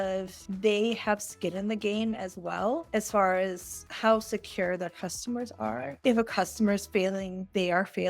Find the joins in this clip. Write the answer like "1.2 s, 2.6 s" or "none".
5.9 s